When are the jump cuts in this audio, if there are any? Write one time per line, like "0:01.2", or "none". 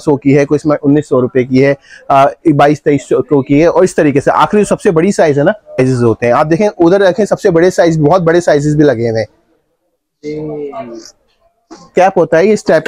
0:05.8
0:11.9